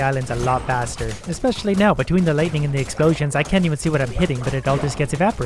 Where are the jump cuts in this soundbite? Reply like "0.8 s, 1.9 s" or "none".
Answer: none